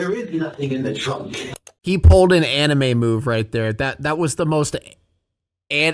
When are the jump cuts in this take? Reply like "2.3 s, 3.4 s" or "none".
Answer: 1.7 s